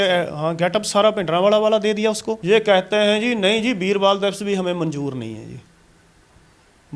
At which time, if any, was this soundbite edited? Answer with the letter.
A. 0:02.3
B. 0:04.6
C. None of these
A